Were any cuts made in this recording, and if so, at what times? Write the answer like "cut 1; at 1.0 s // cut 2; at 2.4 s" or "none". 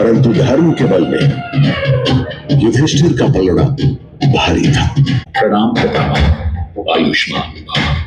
cut 1; at 5.2 s